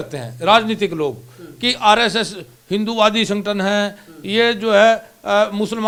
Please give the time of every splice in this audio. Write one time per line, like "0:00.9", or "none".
none